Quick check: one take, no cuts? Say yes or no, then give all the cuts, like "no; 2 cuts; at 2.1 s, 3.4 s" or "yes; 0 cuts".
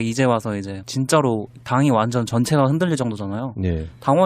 no; 1 cut; at 2.1 s